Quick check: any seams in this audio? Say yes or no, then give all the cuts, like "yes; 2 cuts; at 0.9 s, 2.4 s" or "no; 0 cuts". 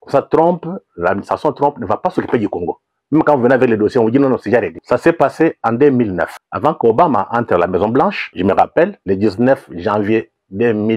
yes; 4 cuts; at 4.8 s, 6.4 s, 8.2 s, 9.0 s